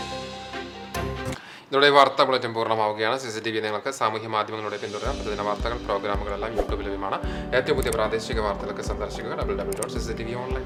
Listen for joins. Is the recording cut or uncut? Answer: uncut